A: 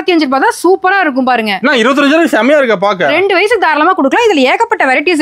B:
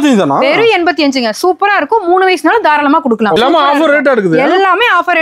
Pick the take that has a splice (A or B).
B